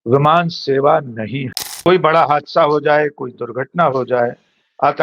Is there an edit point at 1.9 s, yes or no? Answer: yes